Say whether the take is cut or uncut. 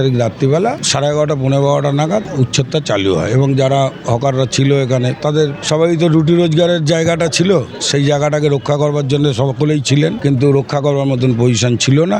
cut